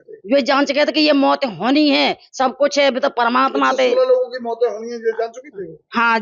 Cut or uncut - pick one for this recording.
uncut